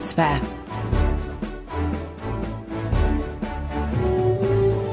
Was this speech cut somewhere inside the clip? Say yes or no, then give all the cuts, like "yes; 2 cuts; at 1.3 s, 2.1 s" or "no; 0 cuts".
no; 0 cuts